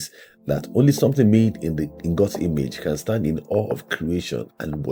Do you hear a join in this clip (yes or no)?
no